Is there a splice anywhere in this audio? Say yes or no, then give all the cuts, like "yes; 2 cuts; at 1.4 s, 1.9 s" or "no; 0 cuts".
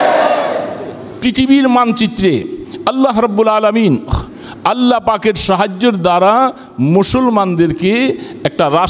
yes; 1 cut; at 1.1 s